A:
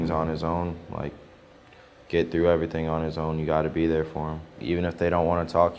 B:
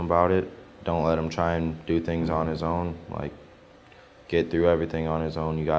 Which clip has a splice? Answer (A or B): A